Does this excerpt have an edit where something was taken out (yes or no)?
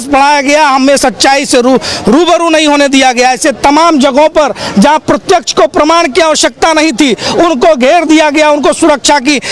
no